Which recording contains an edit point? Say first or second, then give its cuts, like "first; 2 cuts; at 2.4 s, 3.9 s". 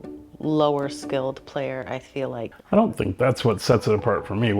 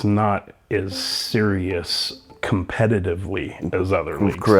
first; 1 cut; at 2.6 s